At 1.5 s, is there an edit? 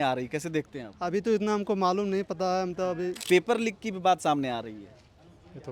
no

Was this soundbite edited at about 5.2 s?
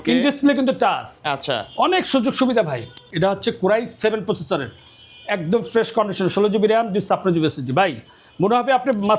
no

